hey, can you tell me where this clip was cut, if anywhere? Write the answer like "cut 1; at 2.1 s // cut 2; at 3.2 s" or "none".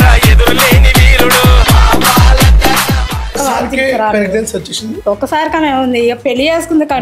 cut 1; at 3.3 s